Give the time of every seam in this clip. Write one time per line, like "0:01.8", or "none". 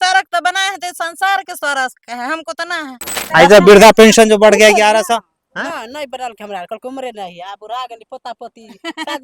0:03.1